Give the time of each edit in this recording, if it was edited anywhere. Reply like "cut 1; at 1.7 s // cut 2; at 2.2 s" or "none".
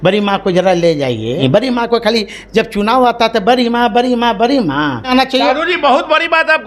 cut 1; at 1.4 s // cut 2; at 5.1 s